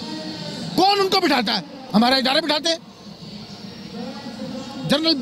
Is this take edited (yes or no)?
no